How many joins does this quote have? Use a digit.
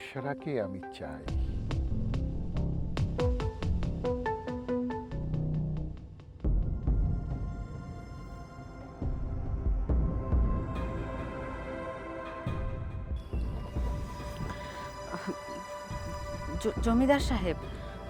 0